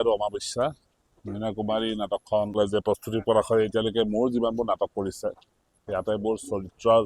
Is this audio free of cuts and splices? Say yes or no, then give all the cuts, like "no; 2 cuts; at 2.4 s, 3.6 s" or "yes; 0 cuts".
no; 1 cut; at 2.6 s